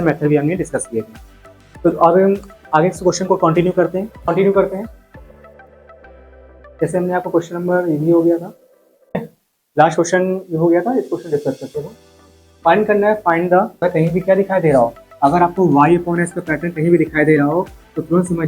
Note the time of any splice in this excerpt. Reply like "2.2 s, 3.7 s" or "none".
4.3 s, 9.2 s, 13.7 s